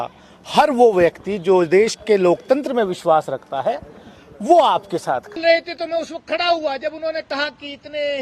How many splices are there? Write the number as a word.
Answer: one